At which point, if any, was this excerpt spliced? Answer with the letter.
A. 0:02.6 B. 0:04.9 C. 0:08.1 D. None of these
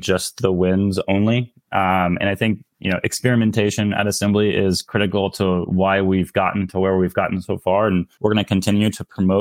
C